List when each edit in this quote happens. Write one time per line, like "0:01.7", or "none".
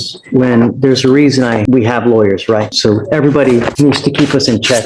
0:01.6
0:02.7
0:03.7

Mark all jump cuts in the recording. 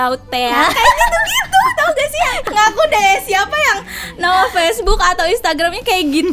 0:02.4

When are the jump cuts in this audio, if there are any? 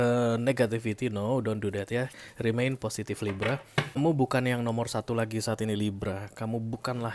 0:04.0

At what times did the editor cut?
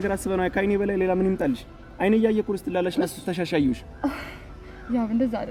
none

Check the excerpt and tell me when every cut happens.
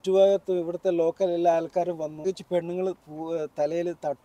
0:02.3

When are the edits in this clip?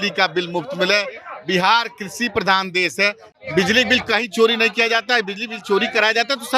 0:03.3

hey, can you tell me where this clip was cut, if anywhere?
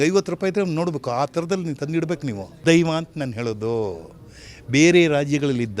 0:02.5

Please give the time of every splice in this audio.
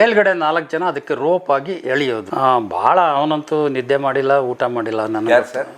0:02.3

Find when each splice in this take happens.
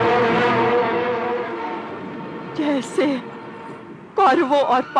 none

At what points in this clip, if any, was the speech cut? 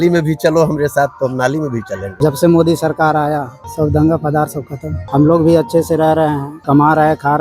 0:02.1
0:03.6
0:04.9
0:06.5

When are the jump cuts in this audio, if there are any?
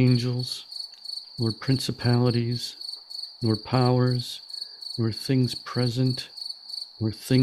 none

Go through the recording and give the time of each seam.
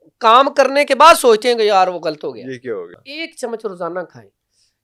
0:02.9

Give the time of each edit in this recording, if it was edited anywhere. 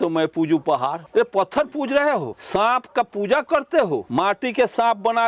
0:01.0
0:02.4
0:04.1

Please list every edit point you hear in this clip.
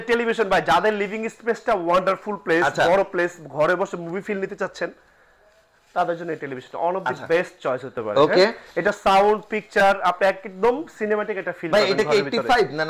none

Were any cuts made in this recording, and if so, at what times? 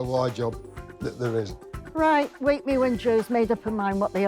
0:01.7

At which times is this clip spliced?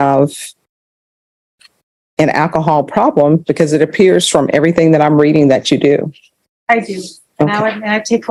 none

